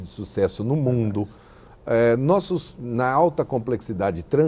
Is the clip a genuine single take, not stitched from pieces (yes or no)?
yes